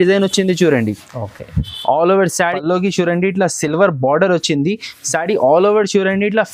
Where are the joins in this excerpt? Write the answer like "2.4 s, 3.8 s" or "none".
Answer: 2.3 s